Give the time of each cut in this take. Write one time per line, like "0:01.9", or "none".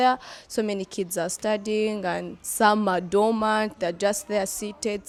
none